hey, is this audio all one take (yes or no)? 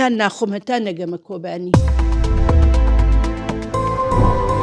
yes